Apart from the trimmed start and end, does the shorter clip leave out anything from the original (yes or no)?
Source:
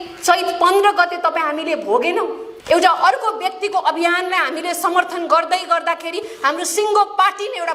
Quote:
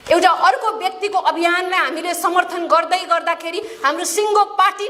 no